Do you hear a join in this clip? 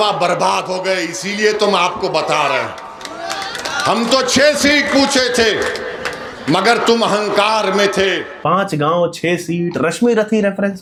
no; 0 cuts

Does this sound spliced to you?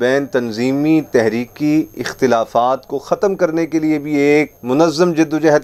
no; 0 cuts

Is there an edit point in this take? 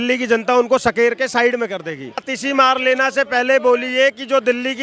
yes; 1 cut; at 2.3 s

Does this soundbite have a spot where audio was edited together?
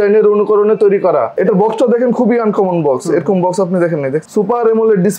yes; 2 cuts; at 1.3 s, 4.2 s

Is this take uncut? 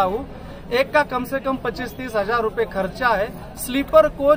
yes; 0 cuts

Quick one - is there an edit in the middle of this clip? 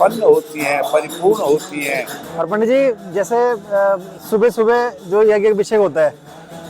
no; 0 cuts

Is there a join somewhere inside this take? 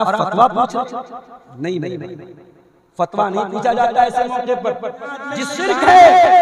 yes; 1 cut; at 5.5 s

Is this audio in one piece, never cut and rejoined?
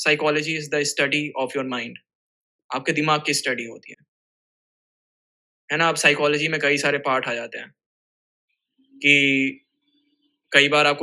yes; 0 cuts

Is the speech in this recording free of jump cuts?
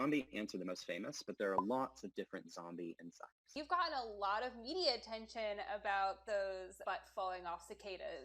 no; 2 cuts; at 3.5 s, 6.7 s

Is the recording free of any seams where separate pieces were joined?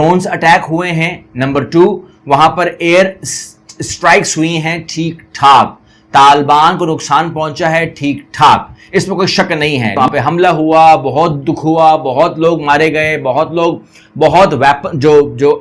no; 1 cut; at 9.9 s

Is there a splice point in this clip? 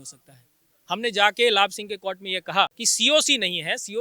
yes; 1 cut; at 2.9 s

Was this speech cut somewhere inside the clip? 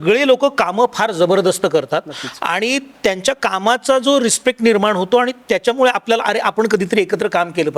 no; 0 cuts

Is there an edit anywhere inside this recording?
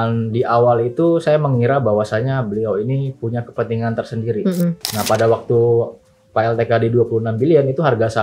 yes; 1 cut; at 4.9 s

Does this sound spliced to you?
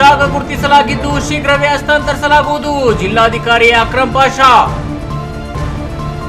no; 0 cuts

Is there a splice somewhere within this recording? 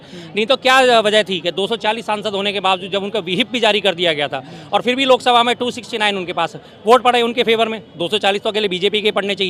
no; 0 cuts

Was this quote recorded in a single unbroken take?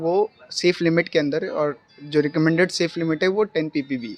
yes; 0 cuts

